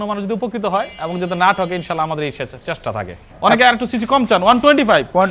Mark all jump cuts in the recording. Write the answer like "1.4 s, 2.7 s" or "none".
3.3 s